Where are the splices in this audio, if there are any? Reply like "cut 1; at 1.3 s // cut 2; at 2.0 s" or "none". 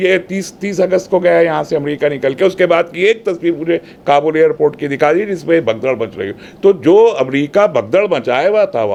none